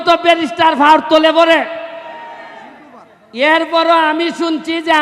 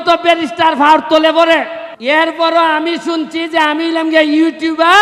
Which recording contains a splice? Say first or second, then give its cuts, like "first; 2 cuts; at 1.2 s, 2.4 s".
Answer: second; 1 cut; at 1.8 s